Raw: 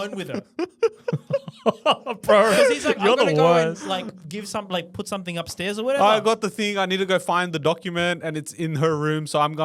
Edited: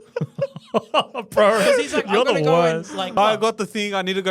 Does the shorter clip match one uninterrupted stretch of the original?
no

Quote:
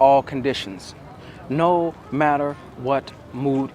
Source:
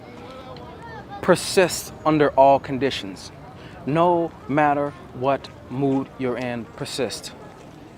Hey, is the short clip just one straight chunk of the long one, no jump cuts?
yes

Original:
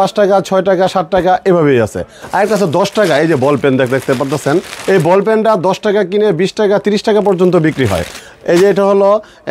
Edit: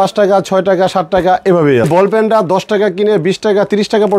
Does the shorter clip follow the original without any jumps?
no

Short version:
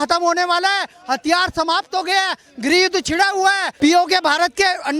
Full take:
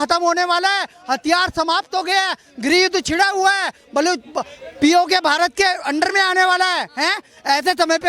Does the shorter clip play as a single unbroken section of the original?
no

